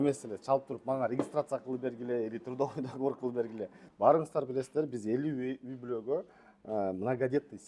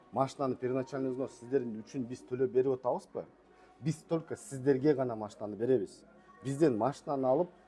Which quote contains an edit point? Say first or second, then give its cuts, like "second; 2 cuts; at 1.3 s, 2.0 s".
first; 1 cut; at 3.8 s